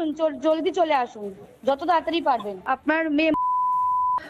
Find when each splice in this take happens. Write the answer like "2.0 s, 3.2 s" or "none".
2.6 s